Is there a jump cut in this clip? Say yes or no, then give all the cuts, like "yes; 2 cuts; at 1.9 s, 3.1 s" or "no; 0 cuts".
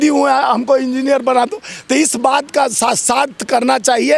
no; 0 cuts